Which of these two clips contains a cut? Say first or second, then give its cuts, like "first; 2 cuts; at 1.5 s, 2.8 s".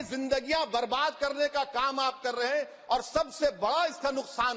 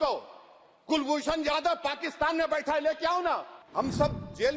second; 1 cut; at 3.6 s